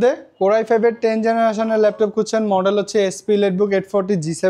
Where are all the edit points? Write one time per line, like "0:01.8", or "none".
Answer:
none